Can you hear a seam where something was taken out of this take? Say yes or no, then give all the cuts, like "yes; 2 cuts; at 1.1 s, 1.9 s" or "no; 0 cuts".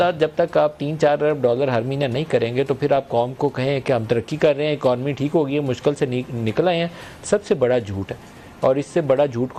no; 0 cuts